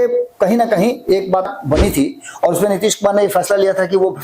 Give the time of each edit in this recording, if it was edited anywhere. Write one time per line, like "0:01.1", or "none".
0:01.5